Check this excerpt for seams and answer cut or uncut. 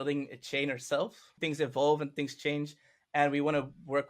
cut